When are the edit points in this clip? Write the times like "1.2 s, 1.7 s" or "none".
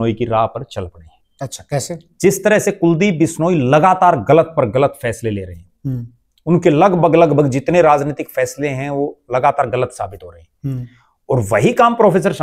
none

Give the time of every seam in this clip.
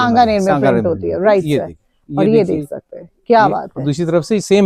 none

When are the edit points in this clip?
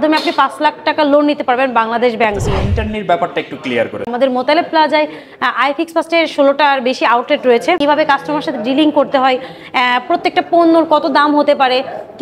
2.5 s, 4.1 s, 7.8 s

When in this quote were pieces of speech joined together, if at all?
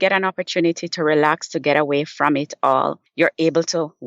3.0 s

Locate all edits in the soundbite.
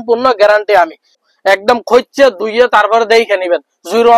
1.2 s

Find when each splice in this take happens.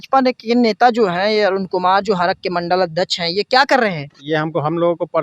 none

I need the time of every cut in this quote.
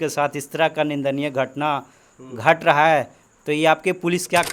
none

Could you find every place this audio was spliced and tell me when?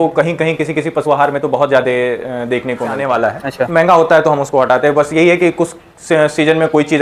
3.0 s

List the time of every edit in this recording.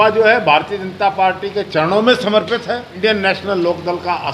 2.9 s

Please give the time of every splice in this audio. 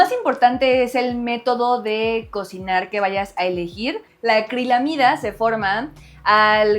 4.1 s

